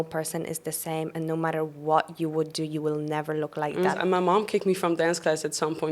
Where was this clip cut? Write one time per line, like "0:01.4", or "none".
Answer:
0:04.0